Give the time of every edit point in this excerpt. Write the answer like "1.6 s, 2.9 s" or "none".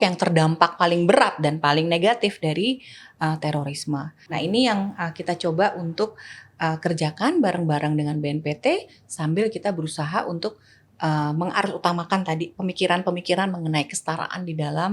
4.2 s